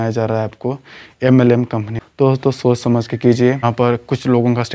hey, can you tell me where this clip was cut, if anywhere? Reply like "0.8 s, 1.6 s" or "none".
2.0 s, 3.6 s

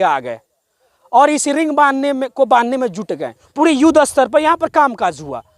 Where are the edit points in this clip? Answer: 3.4 s

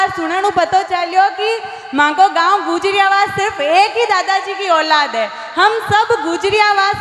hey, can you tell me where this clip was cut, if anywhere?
none

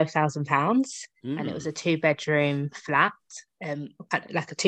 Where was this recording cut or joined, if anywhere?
none

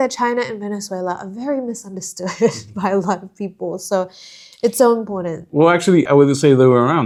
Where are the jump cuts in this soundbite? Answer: none

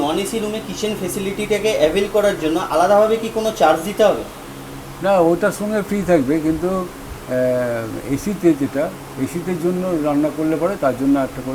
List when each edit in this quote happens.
none

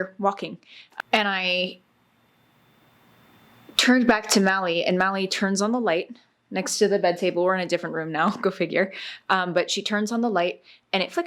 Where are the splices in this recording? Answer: 0.9 s

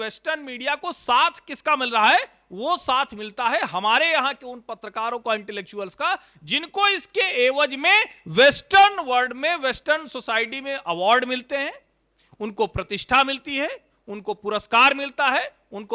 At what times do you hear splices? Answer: none

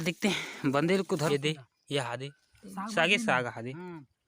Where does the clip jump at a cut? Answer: 1.3 s

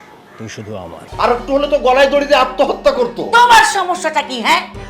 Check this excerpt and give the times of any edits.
1.1 s

